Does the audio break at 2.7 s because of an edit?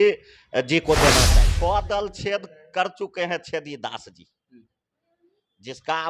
no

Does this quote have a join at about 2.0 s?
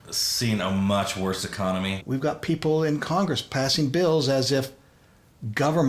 yes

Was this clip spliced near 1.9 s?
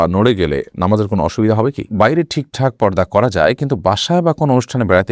yes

